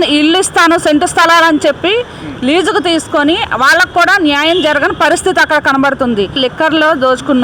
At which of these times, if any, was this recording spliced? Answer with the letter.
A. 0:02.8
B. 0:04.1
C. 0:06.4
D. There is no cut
C